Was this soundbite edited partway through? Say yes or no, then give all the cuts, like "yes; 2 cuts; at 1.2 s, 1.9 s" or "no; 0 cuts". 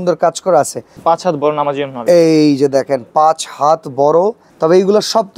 yes; 2 cuts; at 0.9 s, 4.5 s